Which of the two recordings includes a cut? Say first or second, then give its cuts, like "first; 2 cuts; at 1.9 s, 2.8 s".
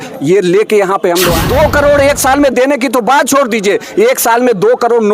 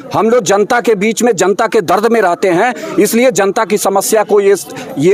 first; 1 cut; at 1.4 s